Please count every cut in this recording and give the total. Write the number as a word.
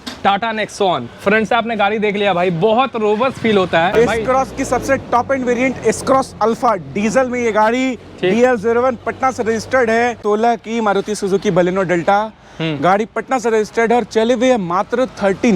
two